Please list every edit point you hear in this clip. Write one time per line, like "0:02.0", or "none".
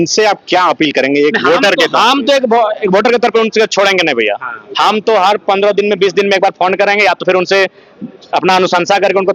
none